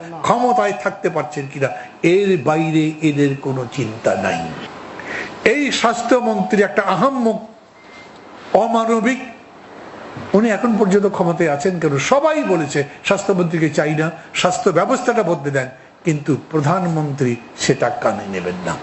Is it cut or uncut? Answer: cut